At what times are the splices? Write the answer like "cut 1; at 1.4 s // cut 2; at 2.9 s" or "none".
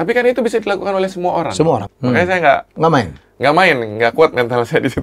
cut 1; at 1.9 s